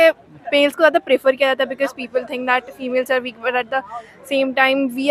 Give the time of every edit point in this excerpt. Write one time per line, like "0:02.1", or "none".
none